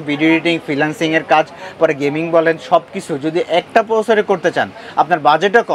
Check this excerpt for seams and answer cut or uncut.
uncut